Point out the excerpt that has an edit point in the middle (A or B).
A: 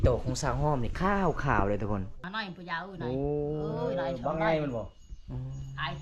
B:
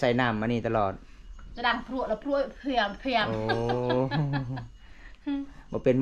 A